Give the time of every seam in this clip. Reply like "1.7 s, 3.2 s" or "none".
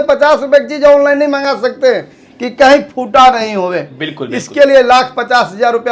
none